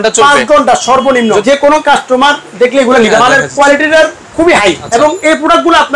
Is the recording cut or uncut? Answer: cut